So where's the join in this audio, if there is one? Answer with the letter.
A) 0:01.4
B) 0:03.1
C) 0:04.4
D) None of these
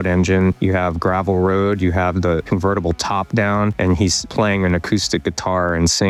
D